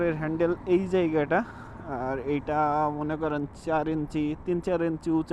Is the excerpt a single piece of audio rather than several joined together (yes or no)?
yes